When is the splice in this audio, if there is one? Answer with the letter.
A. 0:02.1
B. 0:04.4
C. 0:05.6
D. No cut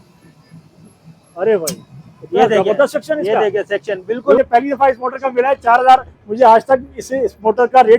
B